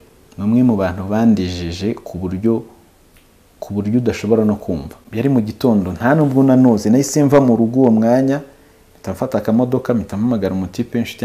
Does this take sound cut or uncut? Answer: cut